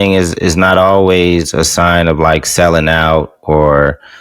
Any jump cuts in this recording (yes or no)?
no